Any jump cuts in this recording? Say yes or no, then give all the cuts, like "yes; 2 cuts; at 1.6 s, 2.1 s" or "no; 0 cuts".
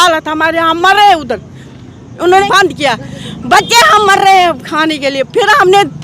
yes; 1 cut; at 2.4 s